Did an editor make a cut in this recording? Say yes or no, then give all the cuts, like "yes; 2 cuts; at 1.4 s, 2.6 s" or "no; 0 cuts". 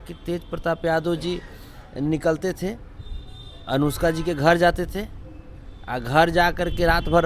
no; 0 cuts